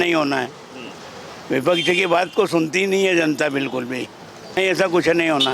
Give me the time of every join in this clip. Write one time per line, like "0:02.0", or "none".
0:04.6